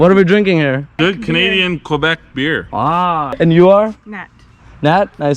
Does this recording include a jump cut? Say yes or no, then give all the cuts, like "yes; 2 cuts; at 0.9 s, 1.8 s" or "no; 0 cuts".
yes; 2 cuts; at 0.9 s, 3.3 s